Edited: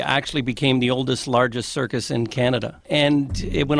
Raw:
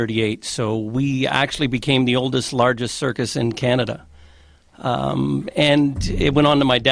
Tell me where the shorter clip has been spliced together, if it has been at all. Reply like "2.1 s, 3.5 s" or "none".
2.8 s